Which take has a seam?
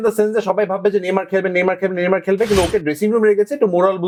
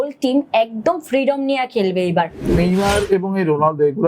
second; 1 cut; at 2.5 s

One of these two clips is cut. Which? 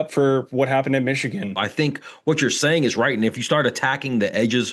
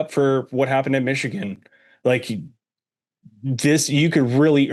first; 1 cut; at 1.6 s

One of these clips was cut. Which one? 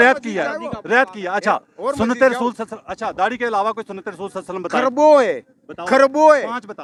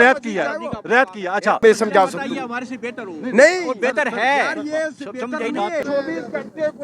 second; 2 cuts; at 1.6 s, 5.8 s

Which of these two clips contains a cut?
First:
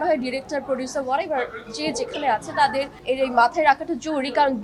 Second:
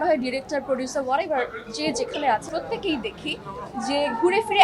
second; 1 cut; at 2.5 s

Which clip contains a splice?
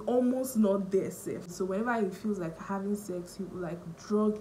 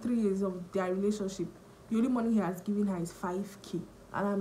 first; 1 cut; at 1.5 s

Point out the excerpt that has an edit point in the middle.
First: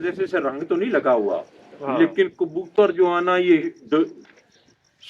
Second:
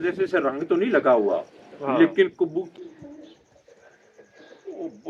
second; 1 cut; at 2.7 s

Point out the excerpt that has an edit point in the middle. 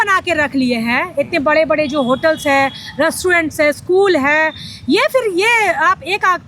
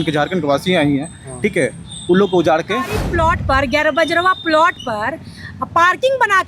second; 1 cut; at 3.0 s

